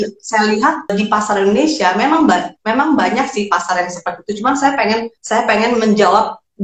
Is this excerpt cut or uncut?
cut